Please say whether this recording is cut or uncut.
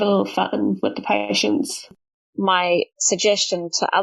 cut